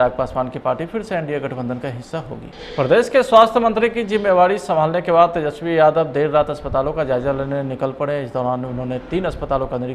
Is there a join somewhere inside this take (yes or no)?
yes